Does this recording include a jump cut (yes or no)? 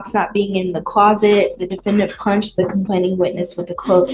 no